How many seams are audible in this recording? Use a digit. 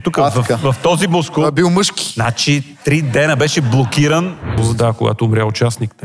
1